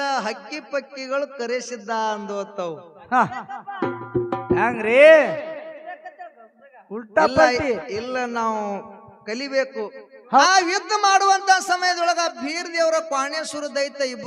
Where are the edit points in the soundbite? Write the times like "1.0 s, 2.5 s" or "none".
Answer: 10.4 s